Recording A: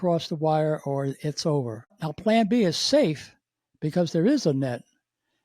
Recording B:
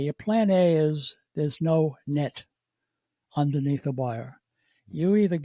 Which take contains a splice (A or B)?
A